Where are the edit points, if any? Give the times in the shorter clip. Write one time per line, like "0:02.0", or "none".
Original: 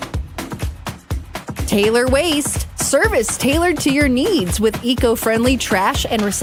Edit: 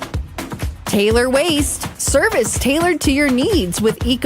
0:00.9